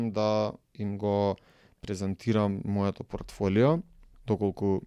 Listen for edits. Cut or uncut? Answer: uncut